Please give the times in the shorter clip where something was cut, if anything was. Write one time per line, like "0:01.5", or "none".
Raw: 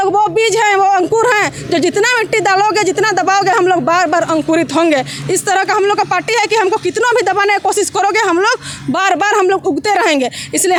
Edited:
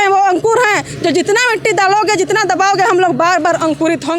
none